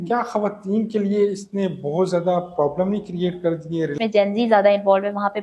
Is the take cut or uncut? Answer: cut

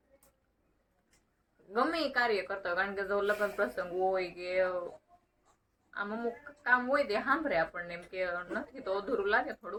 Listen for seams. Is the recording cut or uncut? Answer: uncut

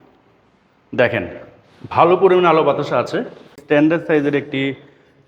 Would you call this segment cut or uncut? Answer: cut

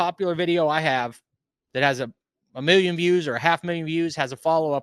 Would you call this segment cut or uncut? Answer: uncut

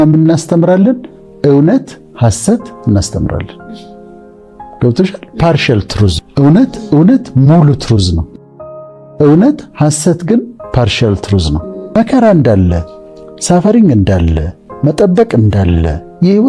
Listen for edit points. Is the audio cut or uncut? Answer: cut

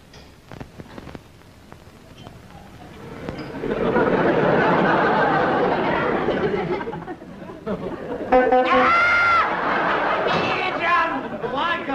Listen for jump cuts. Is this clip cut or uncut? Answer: cut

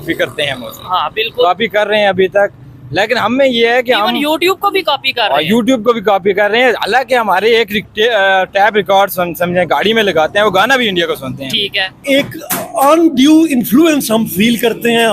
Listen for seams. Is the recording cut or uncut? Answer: cut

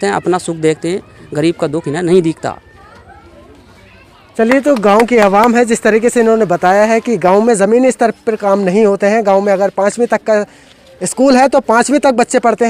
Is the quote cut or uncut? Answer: uncut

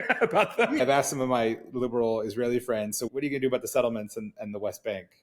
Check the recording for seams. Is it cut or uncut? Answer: cut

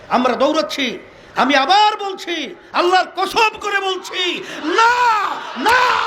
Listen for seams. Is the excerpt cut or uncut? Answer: uncut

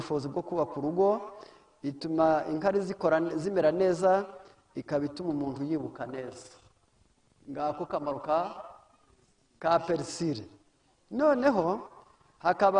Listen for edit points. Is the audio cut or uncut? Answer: uncut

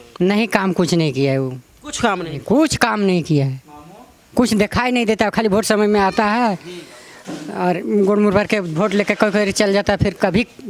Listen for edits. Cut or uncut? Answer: uncut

